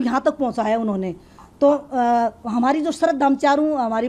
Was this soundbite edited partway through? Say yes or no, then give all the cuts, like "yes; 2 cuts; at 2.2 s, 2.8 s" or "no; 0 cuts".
no; 0 cuts